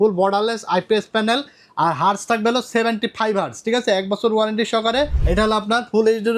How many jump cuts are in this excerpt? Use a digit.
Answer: 1